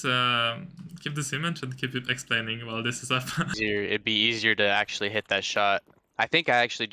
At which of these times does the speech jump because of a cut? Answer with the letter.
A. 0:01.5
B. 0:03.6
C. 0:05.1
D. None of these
B